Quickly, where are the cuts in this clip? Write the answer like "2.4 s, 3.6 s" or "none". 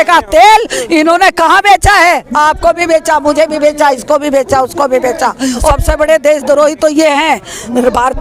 5.7 s

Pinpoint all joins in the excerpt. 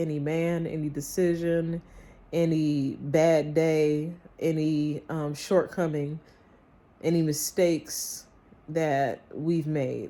none

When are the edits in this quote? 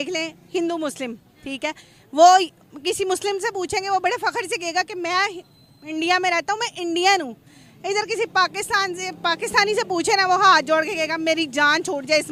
none

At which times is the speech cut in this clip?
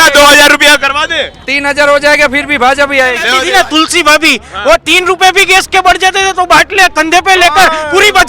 3.3 s

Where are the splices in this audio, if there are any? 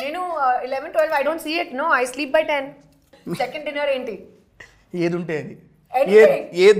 3.2 s

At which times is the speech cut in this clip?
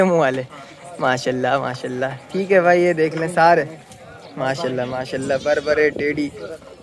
none

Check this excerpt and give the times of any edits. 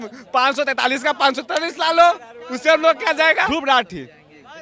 3.5 s

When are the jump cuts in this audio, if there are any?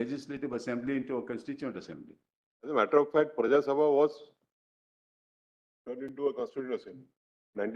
2.7 s

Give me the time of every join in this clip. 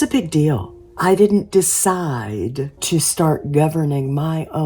1.0 s, 2.8 s

